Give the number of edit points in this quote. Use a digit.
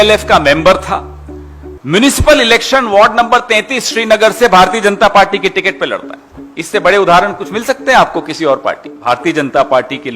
1